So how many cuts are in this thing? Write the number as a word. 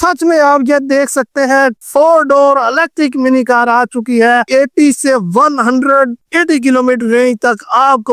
one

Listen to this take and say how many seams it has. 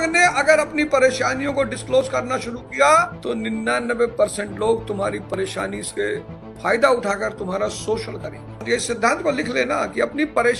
two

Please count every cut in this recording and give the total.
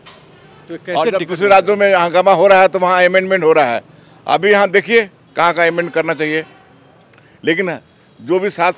zero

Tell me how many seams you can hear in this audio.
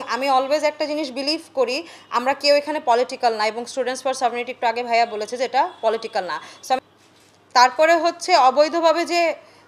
one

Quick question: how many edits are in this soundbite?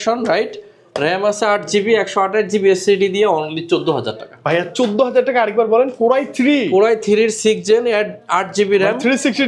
zero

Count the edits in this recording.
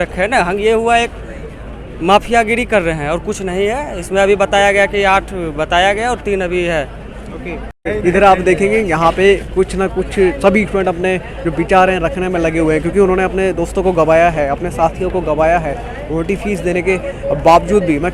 zero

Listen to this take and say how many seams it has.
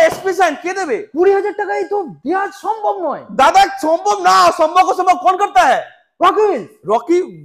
zero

